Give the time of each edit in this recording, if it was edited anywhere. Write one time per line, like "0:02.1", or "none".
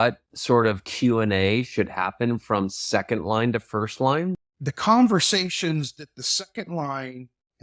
0:04.3